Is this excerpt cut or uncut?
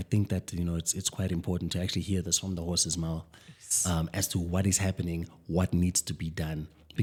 uncut